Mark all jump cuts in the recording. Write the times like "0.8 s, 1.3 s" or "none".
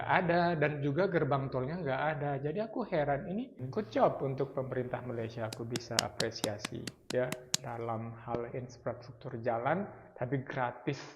3.6 s

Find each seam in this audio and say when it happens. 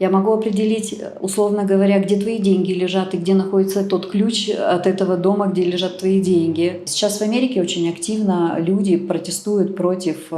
6.9 s

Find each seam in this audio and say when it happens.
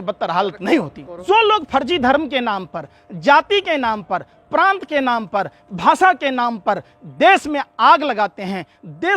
1.0 s

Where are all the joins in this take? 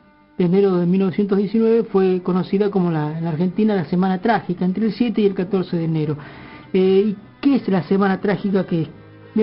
none

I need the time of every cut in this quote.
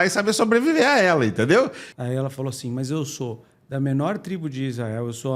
1.9 s

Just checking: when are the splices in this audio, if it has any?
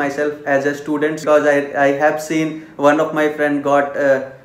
1.2 s

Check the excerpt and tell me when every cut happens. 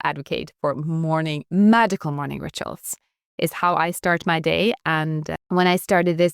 5.3 s

